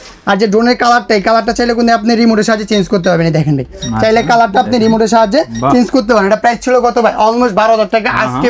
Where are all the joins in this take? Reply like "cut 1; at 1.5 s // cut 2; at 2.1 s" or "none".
none